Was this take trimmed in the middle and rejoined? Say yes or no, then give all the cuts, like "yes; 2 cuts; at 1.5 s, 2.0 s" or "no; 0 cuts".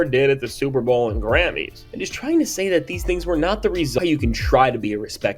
yes; 1 cut; at 4.0 s